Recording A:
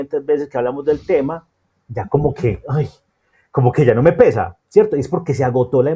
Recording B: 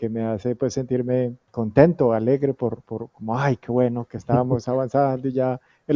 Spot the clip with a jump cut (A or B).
B